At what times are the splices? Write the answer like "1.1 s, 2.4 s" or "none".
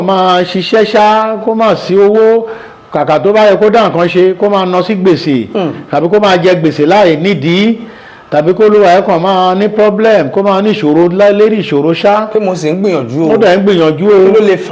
none